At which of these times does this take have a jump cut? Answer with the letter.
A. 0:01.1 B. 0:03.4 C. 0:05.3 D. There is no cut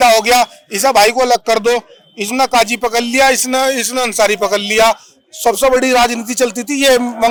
D